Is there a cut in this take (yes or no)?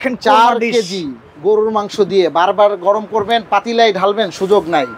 no